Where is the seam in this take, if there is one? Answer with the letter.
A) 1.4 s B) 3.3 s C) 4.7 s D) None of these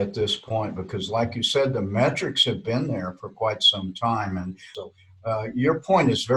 C